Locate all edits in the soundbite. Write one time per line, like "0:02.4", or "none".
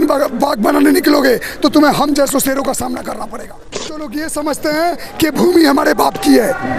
0:03.6